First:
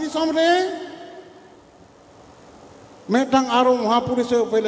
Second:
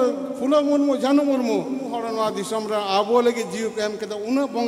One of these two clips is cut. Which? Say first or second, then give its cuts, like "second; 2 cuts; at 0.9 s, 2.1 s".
second; 1 cut; at 1.9 s